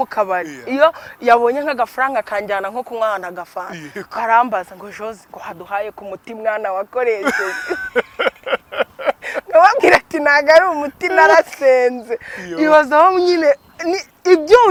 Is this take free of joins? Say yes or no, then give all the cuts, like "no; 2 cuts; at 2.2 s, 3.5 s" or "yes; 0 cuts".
yes; 0 cuts